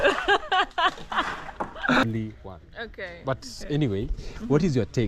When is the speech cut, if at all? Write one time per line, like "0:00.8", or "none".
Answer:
0:02.0